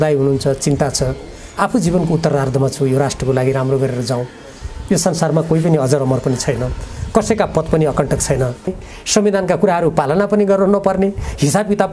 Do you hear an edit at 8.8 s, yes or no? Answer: yes